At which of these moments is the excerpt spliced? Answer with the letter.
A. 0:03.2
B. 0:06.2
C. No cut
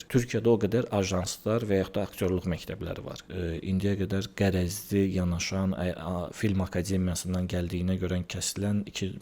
A